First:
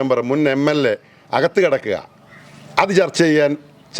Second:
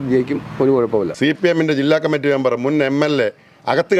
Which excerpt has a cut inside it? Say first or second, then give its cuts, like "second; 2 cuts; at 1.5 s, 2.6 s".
second; 1 cut; at 1.1 s